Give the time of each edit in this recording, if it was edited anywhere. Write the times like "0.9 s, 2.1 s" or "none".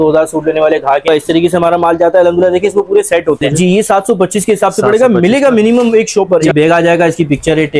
1.1 s, 3.5 s, 6.5 s